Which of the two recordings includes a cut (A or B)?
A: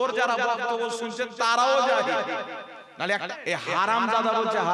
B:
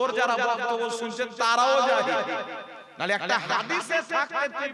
A